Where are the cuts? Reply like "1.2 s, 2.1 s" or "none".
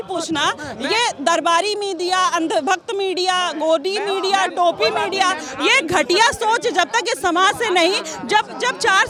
none